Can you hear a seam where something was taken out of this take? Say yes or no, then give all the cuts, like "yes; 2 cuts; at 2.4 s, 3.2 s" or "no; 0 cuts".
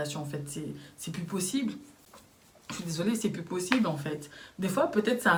no; 0 cuts